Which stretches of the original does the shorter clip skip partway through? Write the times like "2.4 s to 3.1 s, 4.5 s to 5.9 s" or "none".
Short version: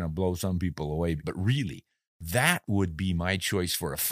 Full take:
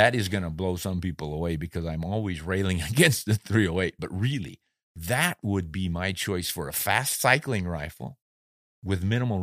1.6 s to 4.0 s

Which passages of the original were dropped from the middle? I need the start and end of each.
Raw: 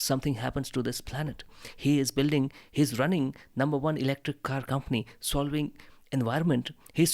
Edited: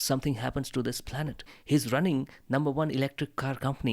1.5 s to 2.6 s

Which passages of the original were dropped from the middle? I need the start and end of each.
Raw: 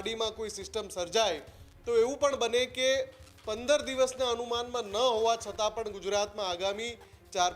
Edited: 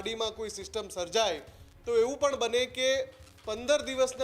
none

